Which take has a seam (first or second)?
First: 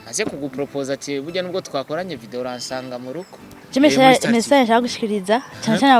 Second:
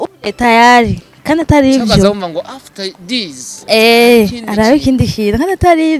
first